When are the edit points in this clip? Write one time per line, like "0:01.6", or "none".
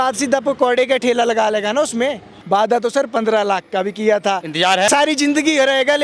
0:02.3
0:04.9

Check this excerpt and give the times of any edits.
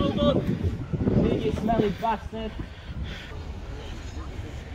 0:03.3

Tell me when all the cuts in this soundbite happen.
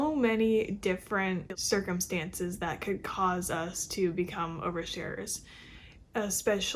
0:01.5

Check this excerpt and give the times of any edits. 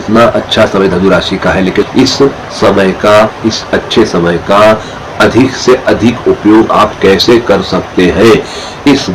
0:01.8

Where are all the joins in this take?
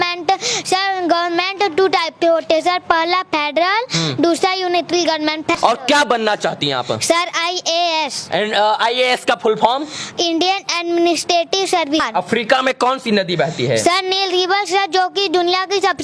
0:05.6
0:12.0

